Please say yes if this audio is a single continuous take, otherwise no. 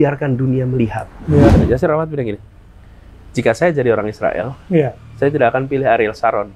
no